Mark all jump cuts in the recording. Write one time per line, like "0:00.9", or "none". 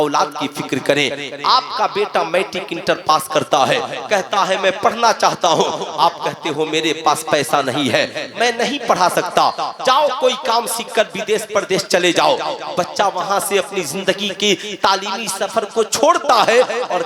none

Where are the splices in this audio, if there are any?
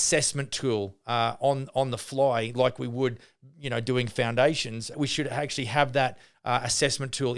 0:04.9

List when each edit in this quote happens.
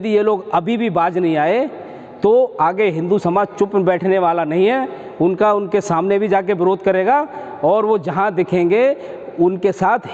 none

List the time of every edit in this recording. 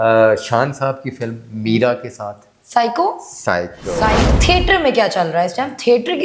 0:04.3

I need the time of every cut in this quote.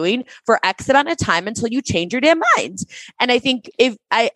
none

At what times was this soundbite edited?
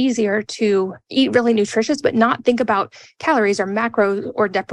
0:01.0

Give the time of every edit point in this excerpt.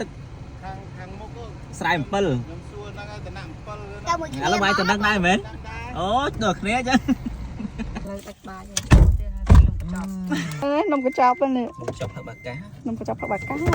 0:08.1
0:10.6

